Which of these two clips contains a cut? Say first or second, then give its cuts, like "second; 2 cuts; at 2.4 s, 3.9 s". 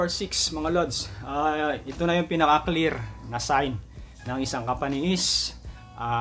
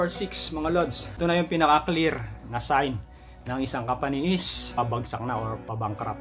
second; 2 cuts; at 1.1 s, 4.8 s